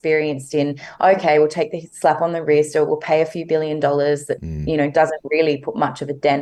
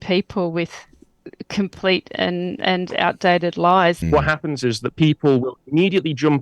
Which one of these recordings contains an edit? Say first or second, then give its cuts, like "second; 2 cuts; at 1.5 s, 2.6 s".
second; 1 cut; at 4.0 s